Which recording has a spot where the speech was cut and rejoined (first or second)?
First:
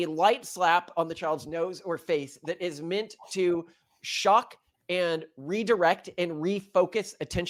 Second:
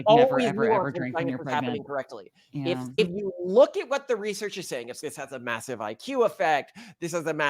second